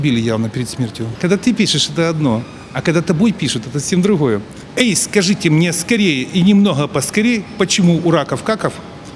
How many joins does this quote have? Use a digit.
2